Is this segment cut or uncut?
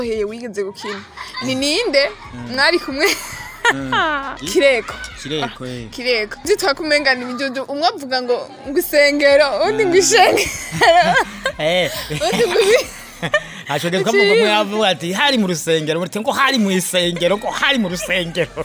cut